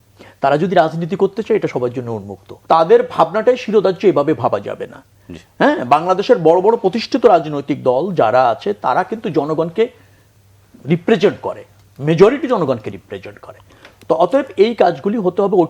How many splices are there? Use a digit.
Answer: 1